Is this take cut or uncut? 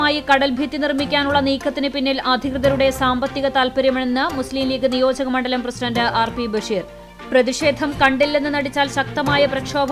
uncut